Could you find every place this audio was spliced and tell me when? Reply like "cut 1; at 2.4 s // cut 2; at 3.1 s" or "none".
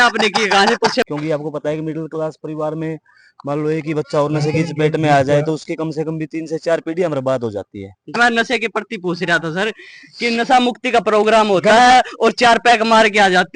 cut 1; at 1.0 s // cut 2; at 8.1 s